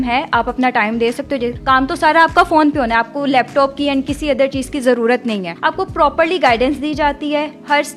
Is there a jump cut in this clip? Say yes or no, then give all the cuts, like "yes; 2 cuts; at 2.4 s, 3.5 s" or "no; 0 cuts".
yes; 2 cuts; at 1.5 s, 5.5 s